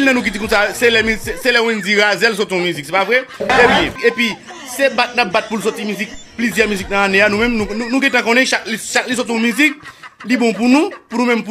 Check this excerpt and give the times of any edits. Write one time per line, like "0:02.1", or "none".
0:04.0